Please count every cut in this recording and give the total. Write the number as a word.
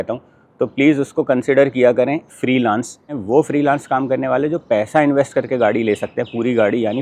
one